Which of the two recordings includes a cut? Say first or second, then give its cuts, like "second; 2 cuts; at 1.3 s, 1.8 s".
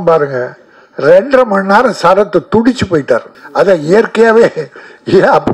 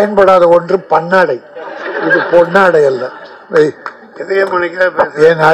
first; 1 cut; at 3.4 s